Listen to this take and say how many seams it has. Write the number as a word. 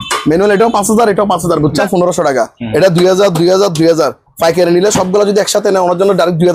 one